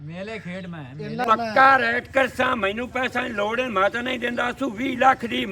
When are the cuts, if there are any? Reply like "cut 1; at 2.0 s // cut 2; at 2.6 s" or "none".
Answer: cut 1; at 1.2 s